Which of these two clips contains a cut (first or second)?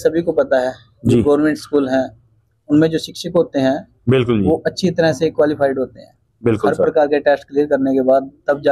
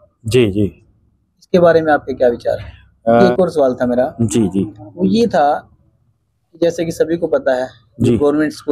second